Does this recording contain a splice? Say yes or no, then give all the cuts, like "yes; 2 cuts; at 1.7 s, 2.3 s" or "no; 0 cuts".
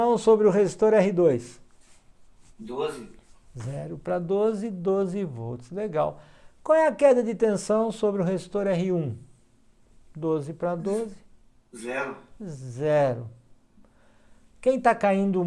no; 0 cuts